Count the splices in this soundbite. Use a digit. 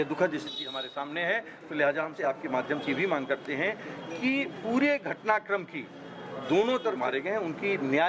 2